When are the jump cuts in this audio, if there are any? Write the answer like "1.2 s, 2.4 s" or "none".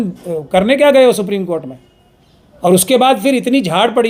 none

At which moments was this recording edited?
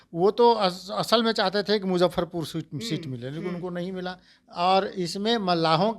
4.3 s

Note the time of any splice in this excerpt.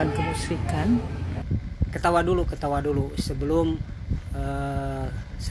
1.4 s

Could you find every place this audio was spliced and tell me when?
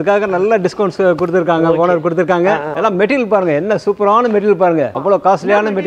2.8 s, 4.9 s

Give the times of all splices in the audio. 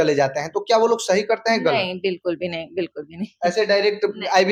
none

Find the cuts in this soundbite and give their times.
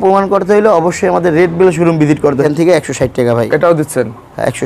2.4 s

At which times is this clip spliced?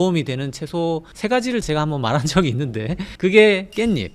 none

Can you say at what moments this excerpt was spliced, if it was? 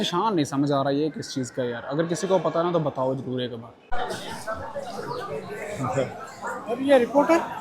3.9 s

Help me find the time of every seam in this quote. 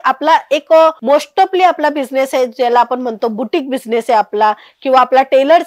none

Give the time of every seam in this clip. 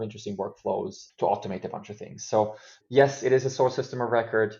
1.0 s

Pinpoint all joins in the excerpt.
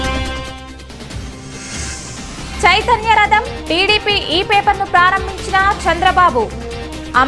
none

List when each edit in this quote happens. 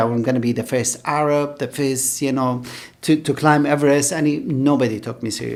none

